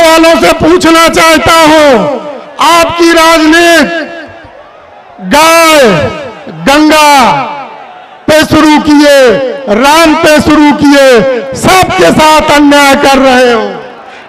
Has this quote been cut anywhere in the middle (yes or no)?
no